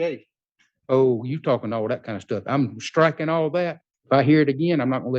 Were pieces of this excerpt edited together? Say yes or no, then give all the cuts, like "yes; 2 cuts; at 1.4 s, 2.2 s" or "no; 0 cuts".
yes; 1 cut; at 3.9 s